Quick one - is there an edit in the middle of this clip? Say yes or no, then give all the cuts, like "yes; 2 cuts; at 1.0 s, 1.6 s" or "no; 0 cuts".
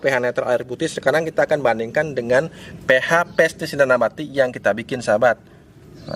no; 0 cuts